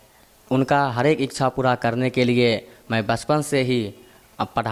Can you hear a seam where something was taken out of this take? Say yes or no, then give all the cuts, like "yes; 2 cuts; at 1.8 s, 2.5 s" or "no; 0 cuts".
no; 0 cuts